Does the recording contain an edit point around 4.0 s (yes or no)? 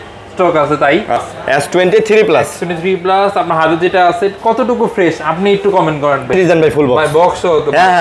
no